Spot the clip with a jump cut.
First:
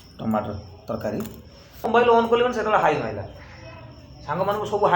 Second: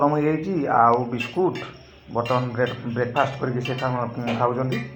first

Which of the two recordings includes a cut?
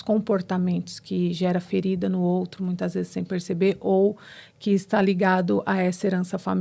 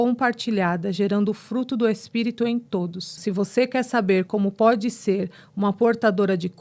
second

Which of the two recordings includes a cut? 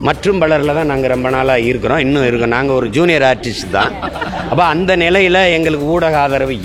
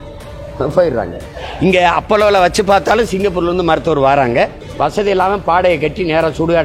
second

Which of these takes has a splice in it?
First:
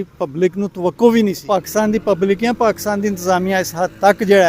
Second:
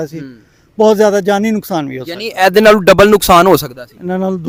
first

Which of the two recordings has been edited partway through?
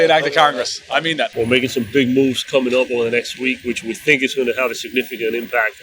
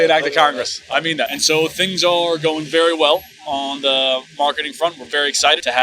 first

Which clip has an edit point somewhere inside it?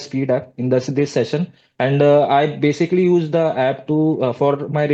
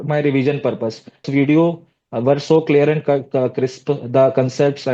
second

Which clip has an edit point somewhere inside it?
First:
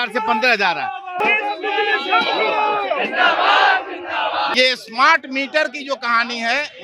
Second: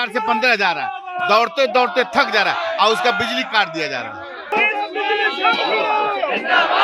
first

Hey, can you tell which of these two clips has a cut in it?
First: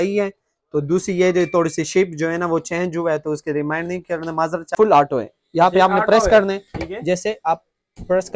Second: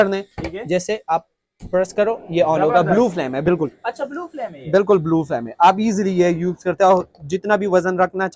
first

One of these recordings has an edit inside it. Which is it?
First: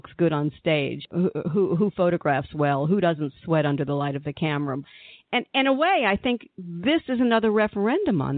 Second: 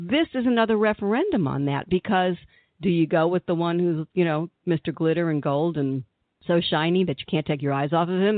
first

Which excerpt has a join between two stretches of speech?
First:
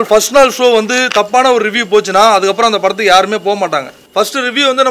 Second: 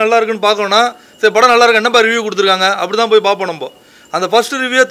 first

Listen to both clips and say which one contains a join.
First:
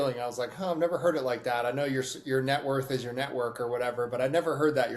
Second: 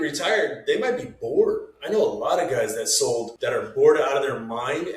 second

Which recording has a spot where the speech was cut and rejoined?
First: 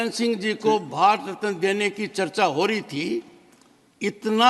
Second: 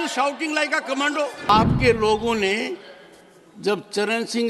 second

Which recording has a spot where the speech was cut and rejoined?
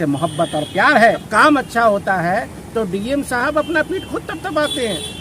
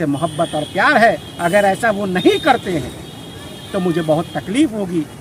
first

